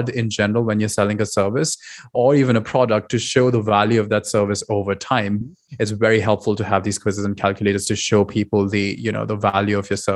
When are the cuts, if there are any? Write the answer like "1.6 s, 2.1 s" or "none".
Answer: 2.1 s, 5.4 s